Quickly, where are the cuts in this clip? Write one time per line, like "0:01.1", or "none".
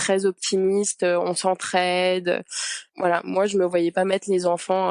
none

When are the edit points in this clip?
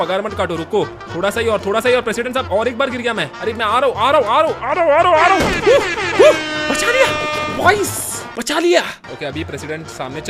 none

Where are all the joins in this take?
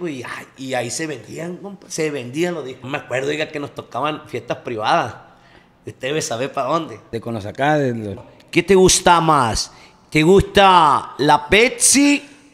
0:02.8
0:07.0
0:08.3

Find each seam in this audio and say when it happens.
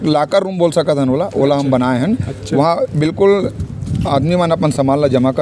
none

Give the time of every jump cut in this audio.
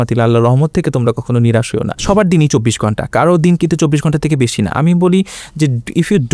0:02.0

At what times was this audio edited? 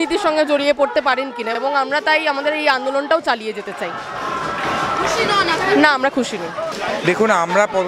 none

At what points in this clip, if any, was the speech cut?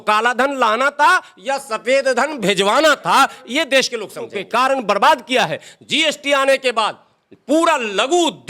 0:04.4

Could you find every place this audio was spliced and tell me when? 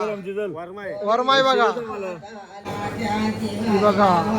0:02.7

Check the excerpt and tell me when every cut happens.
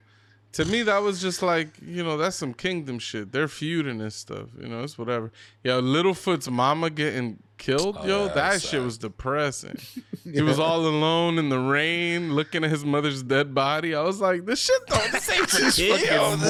none

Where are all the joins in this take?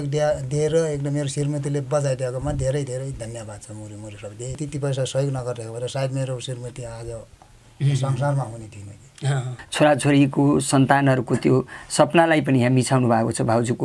0:04.6
0:09.6

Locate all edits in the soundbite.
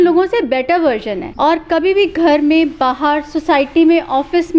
0:01.2

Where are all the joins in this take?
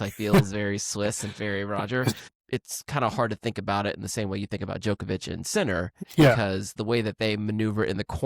0:02.3
0:06.0

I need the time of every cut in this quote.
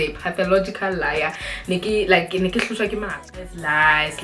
0:03.2

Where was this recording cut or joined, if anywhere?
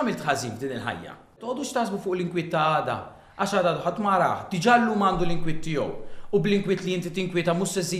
0:01.4

